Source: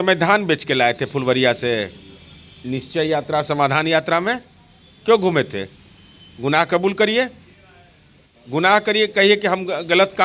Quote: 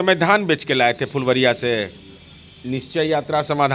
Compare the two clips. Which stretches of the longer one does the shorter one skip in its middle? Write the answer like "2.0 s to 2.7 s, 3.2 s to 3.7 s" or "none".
none

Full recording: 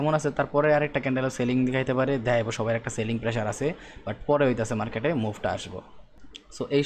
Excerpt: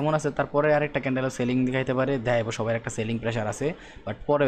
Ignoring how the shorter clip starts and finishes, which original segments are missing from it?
none

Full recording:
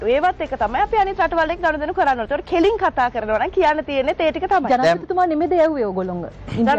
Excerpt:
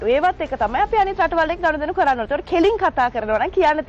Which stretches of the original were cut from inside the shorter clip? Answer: none

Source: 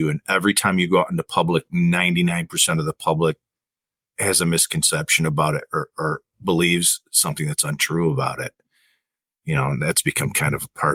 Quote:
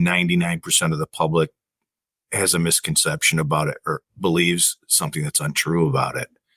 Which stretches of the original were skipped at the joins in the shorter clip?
5.9 s to 6.3 s

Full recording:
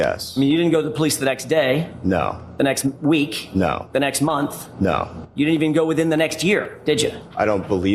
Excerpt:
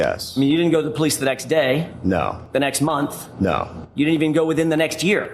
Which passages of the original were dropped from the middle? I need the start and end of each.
2.4 s to 3.8 s

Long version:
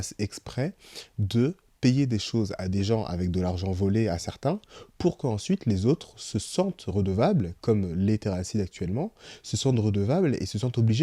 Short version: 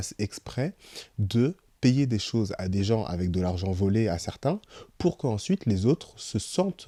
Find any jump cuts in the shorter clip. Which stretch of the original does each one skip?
none

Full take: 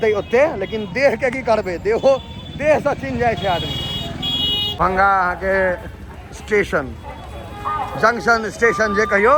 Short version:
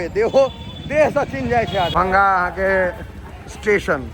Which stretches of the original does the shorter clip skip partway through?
3.6 s to 4.8 s

